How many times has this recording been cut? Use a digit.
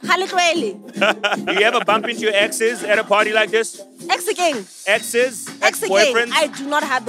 3